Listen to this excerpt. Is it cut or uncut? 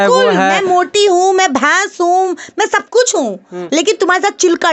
uncut